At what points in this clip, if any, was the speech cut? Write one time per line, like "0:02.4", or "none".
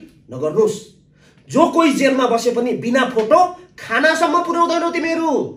none